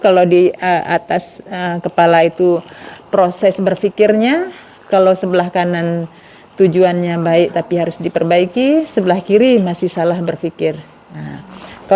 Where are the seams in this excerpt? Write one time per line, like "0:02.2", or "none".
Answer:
none

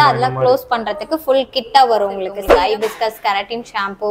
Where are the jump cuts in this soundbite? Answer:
0:02.4

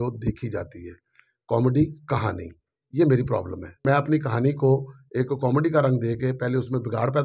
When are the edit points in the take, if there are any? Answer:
0:03.8

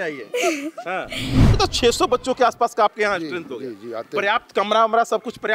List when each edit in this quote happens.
0:01.5

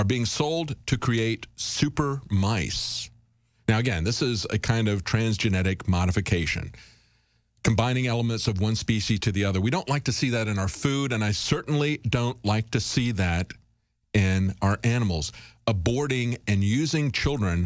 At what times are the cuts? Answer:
0:13.8

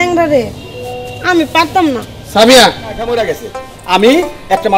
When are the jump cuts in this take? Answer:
0:03.2

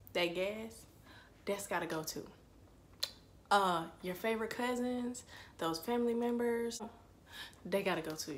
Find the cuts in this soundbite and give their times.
0:06.9

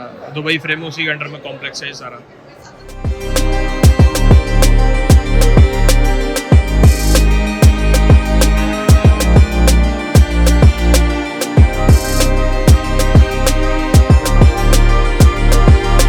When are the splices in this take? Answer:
none

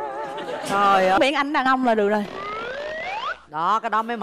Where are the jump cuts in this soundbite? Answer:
0:01.2

